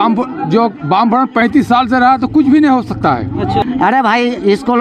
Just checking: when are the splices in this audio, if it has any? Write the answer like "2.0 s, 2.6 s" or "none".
3.6 s